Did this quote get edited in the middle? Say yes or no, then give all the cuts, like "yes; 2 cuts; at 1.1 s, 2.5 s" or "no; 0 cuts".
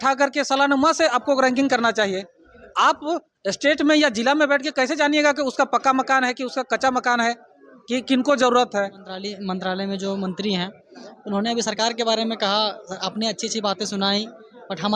yes; 1 cut; at 9.3 s